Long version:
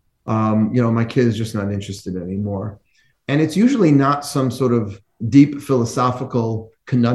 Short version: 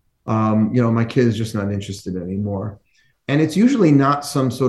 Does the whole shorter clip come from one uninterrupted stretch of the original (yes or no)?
yes